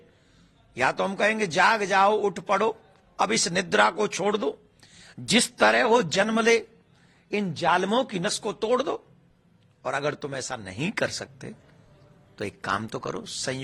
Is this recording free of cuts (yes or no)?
yes